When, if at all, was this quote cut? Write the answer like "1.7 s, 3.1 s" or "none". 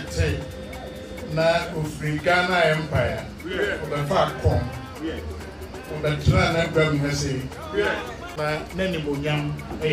8.3 s